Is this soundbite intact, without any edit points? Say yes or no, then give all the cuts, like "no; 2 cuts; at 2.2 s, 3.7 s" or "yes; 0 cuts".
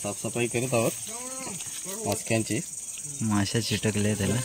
yes; 0 cuts